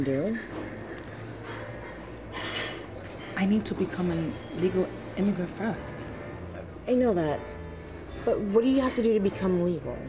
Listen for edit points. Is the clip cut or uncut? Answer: uncut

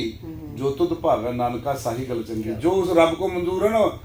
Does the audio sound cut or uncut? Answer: uncut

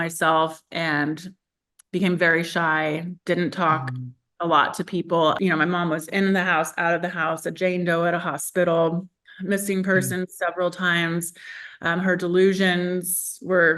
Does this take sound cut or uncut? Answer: uncut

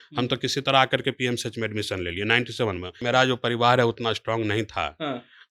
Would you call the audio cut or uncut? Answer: cut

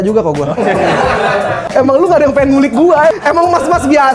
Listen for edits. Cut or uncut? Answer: cut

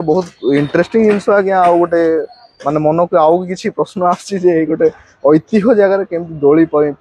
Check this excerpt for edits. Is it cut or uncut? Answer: uncut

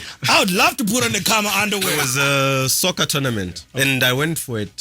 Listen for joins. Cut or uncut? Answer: cut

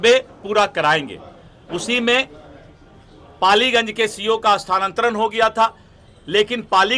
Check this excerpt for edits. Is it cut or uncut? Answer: uncut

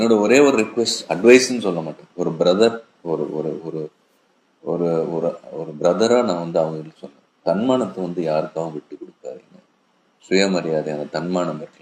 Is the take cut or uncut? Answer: uncut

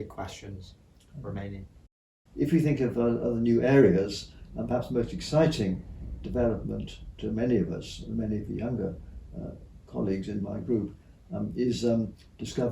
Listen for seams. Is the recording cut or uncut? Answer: cut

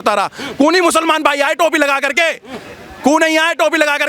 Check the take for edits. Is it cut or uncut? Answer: uncut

